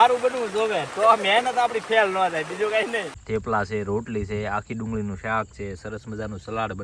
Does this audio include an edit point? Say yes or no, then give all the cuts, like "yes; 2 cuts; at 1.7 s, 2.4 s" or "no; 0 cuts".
yes; 1 cut; at 3.1 s